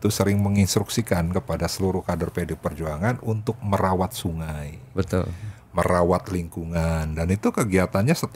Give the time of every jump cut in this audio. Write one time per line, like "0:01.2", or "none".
none